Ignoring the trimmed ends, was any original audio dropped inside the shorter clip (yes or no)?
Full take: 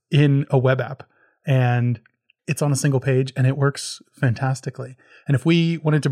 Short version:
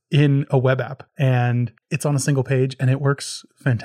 yes